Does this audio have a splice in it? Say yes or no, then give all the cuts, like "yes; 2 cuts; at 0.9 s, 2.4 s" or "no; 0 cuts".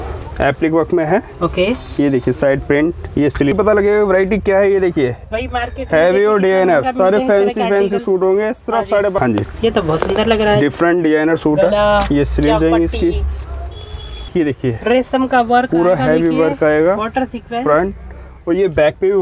yes; 3 cuts; at 3.5 s, 9.2 s, 14.3 s